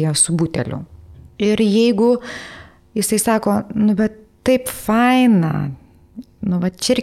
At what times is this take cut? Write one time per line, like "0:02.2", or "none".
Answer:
0:01.1

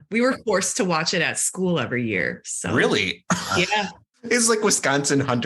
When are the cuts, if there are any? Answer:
0:04.1

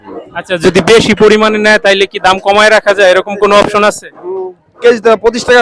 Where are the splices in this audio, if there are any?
none

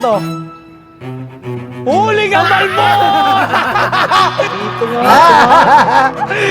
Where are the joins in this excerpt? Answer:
0:04.5

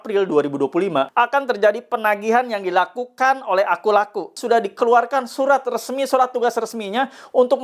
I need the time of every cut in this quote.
0:01.1
0:04.3

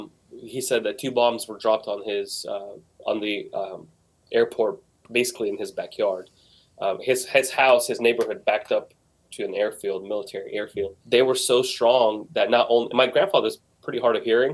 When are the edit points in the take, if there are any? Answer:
0:11.0

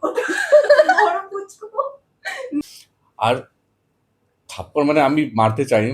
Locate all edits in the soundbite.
0:02.6

